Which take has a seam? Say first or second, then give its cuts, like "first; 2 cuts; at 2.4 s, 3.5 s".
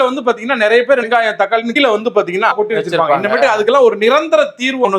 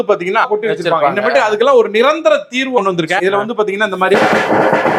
first; 1 cut; at 1.0 s